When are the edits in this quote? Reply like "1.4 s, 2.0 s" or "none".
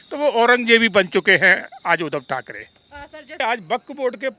3.4 s